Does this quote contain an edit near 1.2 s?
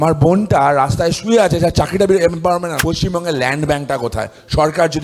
no; 1 cut; at 2.7 s

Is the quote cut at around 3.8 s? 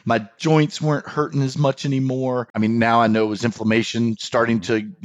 no; 1 cut; at 2.5 s

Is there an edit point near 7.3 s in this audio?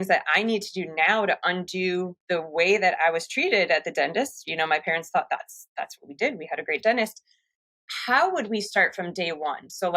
no; 1 cut; at 2.2 s

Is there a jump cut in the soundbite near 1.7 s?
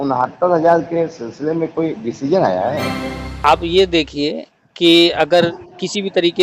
no; 1 cut; at 3.4 s

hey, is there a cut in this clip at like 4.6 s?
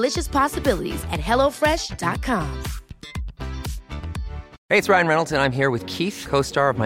yes; 1 cut; at 4.6 s

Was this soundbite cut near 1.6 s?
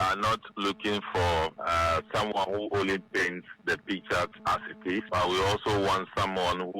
yes; 2 cuts; at 1.6 s, 5.1 s

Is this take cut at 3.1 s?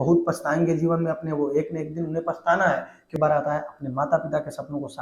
yes; 1 cut; at 3.1 s

